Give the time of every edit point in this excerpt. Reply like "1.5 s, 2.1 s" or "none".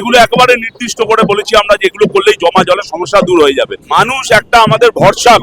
3.8 s